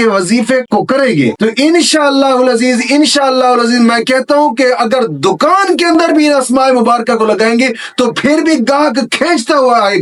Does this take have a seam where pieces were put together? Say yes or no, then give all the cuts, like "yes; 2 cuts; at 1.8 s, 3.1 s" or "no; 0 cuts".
no; 0 cuts